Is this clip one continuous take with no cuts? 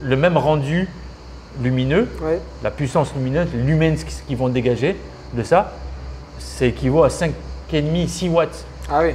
yes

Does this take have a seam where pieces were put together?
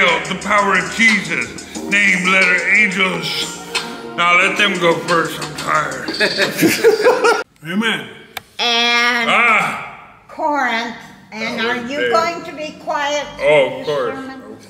yes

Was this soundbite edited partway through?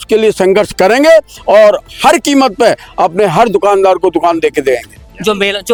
no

